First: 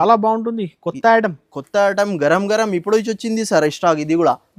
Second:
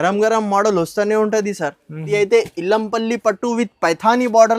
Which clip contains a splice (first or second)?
second